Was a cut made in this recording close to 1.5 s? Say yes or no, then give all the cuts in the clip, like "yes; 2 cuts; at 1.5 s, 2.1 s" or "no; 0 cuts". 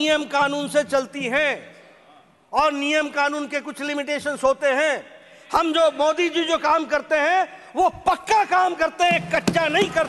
no; 0 cuts